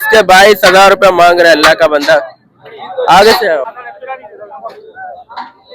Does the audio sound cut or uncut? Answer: cut